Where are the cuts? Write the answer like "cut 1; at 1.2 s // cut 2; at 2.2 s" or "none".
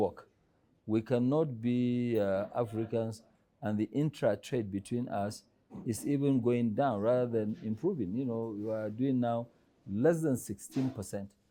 none